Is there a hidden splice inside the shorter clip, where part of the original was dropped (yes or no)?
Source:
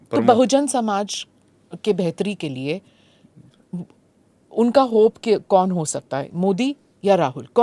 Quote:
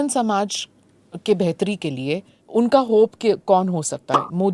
yes